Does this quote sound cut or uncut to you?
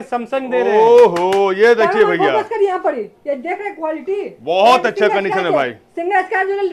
uncut